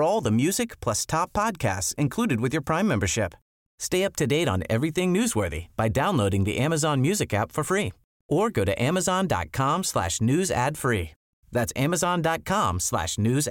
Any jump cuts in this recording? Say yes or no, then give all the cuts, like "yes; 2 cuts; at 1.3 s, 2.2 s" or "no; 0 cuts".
no; 0 cuts